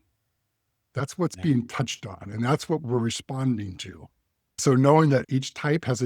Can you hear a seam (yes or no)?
yes